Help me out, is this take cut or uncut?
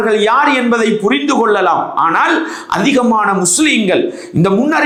uncut